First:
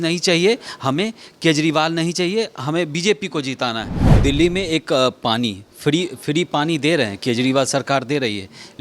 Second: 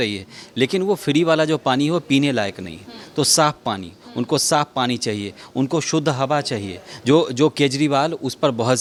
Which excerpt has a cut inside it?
first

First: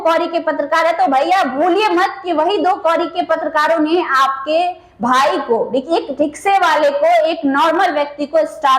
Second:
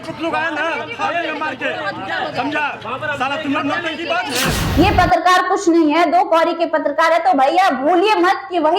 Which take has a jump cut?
second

